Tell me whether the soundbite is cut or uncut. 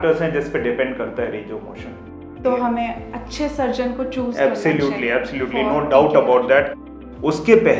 cut